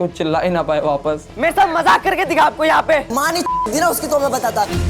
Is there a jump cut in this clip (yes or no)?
yes